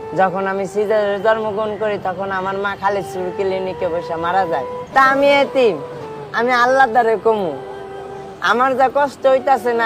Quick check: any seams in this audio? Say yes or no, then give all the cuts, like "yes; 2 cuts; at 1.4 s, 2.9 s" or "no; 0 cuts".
yes; 1 cut; at 4.8 s